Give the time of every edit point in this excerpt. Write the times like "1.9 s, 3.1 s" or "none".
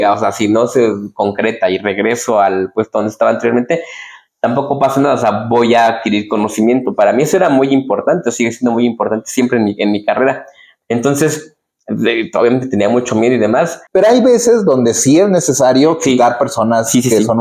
13.8 s